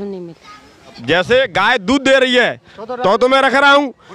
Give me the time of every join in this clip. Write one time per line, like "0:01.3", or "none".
0:01.0